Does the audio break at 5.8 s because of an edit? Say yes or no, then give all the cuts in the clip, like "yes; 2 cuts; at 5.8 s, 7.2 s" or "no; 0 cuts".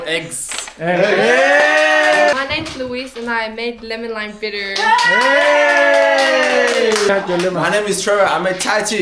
no; 2 cuts; at 2.3 s, 7.1 s